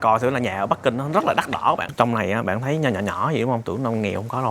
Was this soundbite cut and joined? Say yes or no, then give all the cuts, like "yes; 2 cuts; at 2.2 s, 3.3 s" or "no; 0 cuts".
yes; 1 cut; at 1.9 s